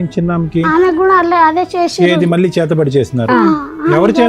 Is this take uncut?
yes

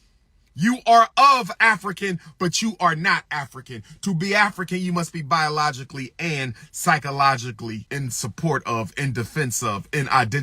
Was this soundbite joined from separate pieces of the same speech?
yes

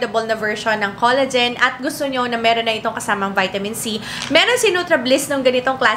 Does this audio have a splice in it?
no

